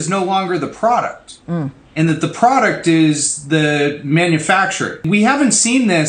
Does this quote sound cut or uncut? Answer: cut